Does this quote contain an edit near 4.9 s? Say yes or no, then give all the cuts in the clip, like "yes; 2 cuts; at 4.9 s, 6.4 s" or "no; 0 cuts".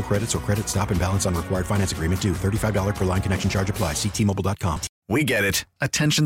yes; 1 cut; at 4.9 s